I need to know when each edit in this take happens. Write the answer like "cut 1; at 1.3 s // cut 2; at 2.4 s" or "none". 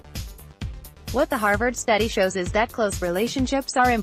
cut 1; at 1.1 s